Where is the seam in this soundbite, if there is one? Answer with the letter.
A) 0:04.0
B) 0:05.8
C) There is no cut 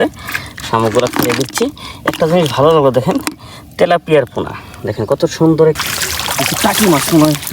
B